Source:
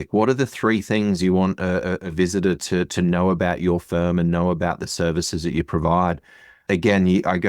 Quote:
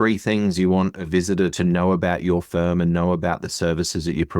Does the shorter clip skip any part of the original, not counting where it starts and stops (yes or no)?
yes